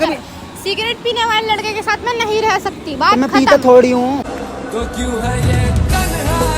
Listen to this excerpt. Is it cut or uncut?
uncut